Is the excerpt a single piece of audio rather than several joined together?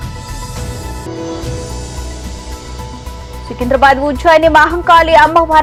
yes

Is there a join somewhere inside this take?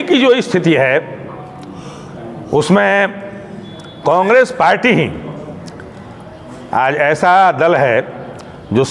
no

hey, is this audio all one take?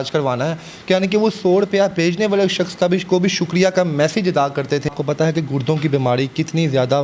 no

